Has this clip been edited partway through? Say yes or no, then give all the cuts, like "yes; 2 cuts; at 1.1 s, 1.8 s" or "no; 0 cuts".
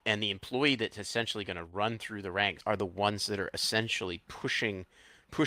yes; 1 cut; at 2.6 s